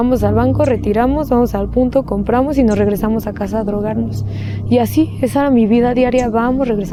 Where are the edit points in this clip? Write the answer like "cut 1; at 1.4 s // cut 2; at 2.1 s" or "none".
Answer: none